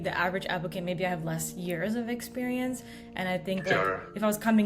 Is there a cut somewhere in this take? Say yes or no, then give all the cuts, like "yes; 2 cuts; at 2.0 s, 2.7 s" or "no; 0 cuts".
no; 0 cuts